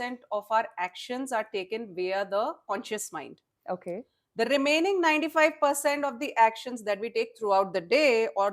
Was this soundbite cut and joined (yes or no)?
no